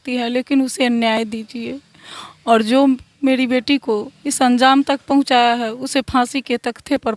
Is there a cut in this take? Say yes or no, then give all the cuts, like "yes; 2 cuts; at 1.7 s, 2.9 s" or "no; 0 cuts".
no; 0 cuts